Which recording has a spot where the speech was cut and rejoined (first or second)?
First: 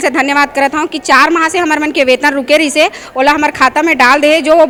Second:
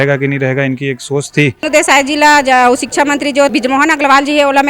second